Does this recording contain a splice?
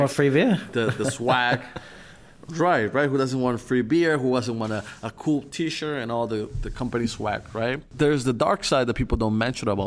yes; 1 cut; at 7.9 s

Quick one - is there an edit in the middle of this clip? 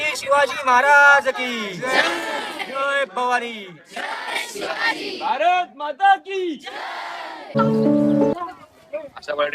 yes; 1 cut; at 7.6 s

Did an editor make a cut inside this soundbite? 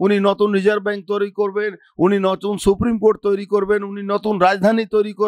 no; 0 cuts

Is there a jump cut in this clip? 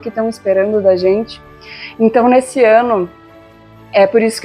no; 0 cuts

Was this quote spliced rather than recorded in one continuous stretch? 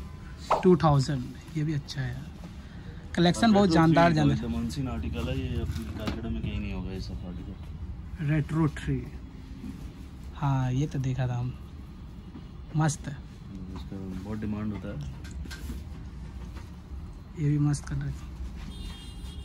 no; 0 cuts

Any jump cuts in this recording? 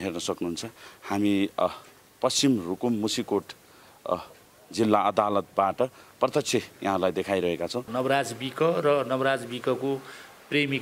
yes; 1 cut; at 7.9 s

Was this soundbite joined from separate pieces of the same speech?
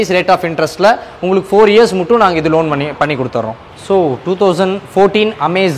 no; 0 cuts

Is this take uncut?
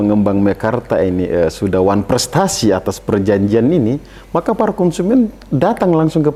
yes; 0 cuts

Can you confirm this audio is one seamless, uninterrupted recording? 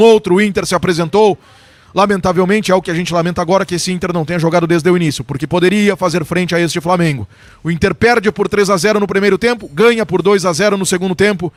yes; 0 cuts

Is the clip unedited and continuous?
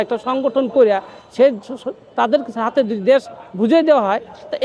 yes; 0 cuts

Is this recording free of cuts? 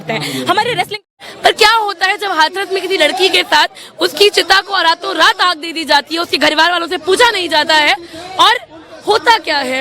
no; 1 cut; at 1.2 s

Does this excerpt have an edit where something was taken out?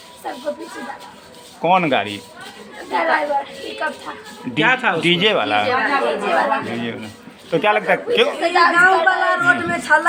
no; 0 cuts

